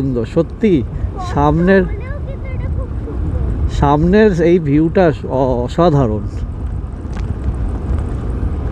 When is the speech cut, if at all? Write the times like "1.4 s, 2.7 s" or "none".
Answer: none